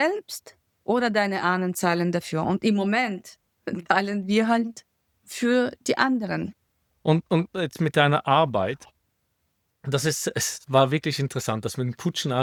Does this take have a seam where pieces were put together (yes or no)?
no